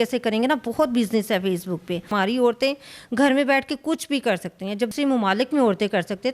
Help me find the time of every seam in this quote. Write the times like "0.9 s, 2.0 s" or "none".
2.1 s, 4.9 s